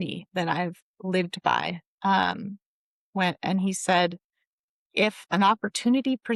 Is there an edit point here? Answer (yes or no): no